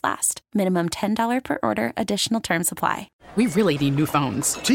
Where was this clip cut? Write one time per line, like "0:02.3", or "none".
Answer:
0:03.1